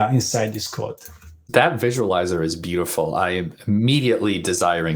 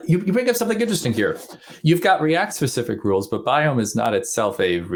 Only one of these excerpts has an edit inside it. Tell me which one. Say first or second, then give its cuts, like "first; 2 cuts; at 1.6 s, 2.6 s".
first; 1 cut; at 1.3 s